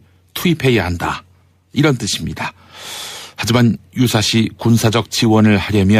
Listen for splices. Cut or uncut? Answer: cut